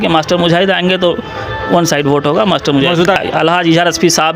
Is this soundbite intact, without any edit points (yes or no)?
no